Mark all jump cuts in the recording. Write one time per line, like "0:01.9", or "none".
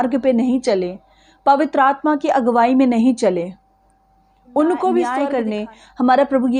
0:05.3